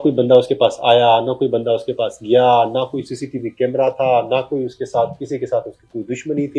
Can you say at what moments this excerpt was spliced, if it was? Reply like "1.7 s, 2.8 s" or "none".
none